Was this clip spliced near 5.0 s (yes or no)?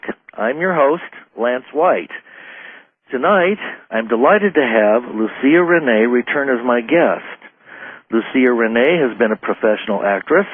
no